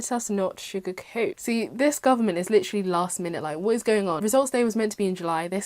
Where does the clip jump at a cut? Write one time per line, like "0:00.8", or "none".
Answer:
0:01.4
0:04.2